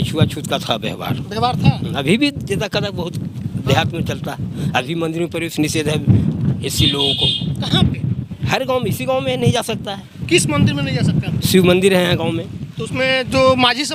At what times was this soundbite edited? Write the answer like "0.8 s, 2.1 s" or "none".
none